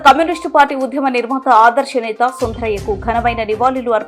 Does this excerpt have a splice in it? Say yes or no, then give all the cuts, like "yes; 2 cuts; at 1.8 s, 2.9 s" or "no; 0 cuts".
no; 0 cuts